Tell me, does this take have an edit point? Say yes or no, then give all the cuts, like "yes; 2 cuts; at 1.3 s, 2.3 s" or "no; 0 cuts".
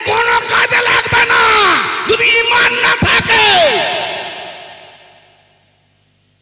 no; 0 cuts